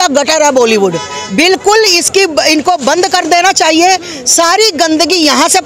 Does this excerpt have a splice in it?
no; 0 cuts

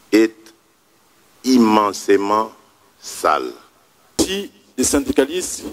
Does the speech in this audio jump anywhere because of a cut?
yes; 1 cut; at 4.2 s

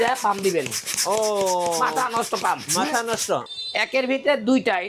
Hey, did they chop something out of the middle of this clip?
yes; 1 cut; at 3.5 s

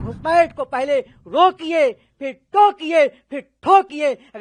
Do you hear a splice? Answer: no; 0 cuts

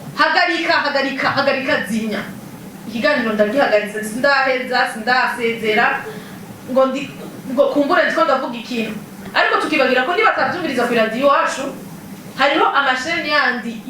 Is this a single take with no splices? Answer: no; 1 cut; at 9.2 s

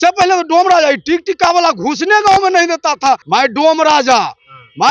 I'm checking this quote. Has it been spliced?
yes; 1 cut; at 3.2 s

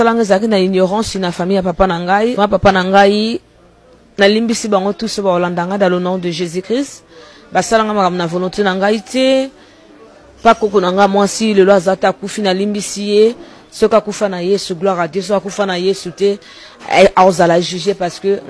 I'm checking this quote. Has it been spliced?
yes; 1 cut; at 2.3 s

